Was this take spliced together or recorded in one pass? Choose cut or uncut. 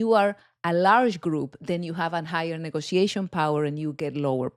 uncut